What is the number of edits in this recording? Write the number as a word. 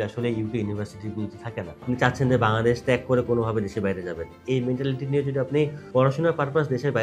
two